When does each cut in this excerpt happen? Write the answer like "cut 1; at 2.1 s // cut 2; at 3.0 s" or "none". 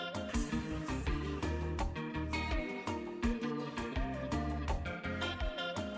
none